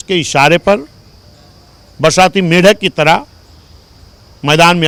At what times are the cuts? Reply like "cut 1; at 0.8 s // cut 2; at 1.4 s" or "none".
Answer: none

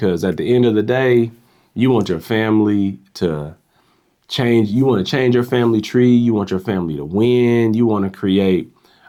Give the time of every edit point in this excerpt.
none

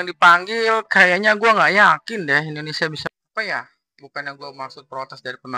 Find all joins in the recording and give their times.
cut 1; at 3.1 s

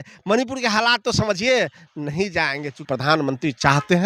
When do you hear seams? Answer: cut 1; at 2.9 s

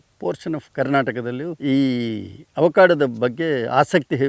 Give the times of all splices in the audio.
cut 1; at 1.6 s

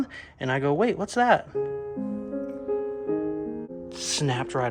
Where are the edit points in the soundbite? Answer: cut 1; at 3.7 s

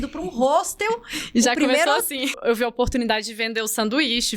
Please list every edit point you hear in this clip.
cut 1; at 2.4 s

